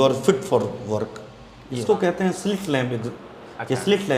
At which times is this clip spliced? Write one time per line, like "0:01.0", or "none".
0:01.7